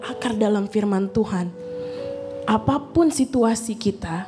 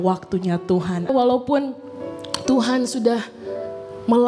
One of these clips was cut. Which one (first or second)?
second